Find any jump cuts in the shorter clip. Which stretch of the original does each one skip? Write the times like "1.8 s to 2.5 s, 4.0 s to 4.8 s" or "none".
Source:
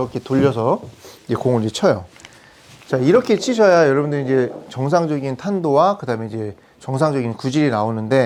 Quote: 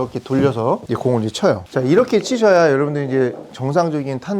0.8 s to 1.2 s, 2.0 s to 2.8 s